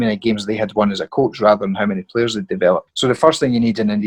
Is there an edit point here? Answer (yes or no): no